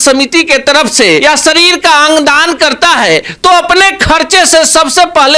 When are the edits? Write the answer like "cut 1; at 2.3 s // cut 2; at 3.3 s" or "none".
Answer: cut 1; at 1.2 s